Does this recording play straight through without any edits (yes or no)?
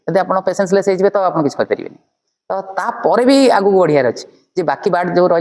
yes